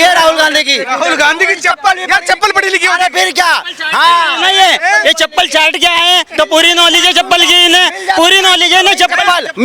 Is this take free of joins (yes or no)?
yes